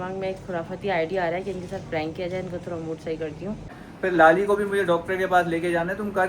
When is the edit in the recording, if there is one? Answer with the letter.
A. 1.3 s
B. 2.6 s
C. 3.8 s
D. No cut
C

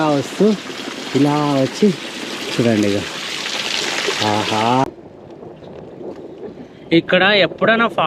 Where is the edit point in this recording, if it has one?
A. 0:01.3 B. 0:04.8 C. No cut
B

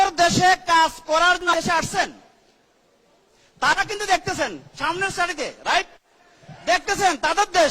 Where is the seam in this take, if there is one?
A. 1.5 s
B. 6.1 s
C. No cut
A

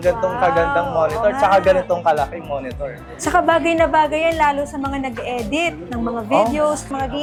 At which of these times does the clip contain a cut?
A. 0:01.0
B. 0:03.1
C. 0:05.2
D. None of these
D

